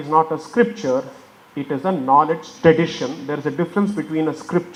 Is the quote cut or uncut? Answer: uncut